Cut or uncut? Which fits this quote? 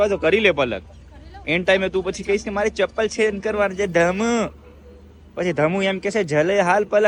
uncut